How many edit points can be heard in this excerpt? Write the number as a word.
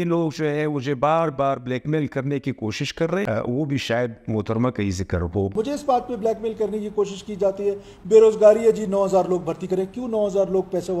one